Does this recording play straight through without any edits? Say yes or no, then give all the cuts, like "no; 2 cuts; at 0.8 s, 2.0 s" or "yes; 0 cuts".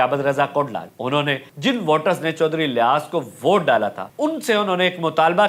no; 2 cuts; at 1.1 s, 4.0 s